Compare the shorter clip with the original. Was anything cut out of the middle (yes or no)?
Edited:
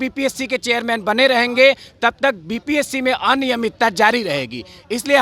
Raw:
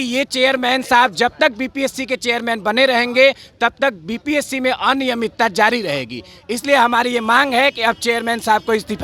no